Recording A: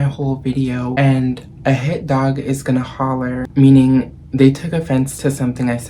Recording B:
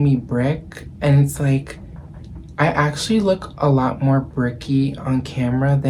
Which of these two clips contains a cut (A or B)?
A